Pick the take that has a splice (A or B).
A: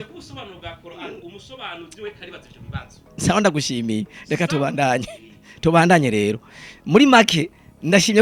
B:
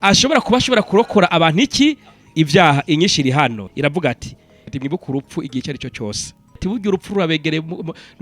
B